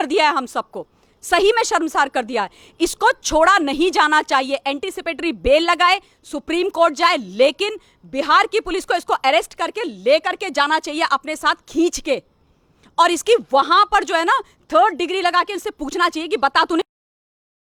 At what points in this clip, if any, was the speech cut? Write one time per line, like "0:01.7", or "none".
none